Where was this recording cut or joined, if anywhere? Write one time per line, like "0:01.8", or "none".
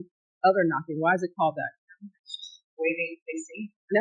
0:01.5